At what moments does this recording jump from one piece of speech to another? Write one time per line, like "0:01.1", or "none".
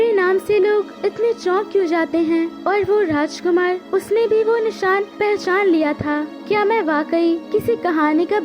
0:00.9
0:02.6
0:03.8
0:05.1
0:06.3
0:07.4